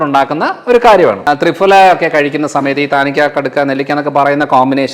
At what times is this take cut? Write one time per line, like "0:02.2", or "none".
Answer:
0:01.2